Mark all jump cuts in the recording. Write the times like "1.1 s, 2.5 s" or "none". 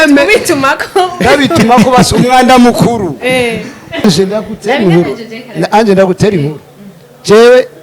4.1 s